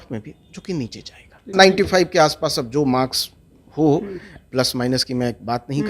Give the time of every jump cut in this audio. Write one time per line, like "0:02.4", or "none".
0:01.5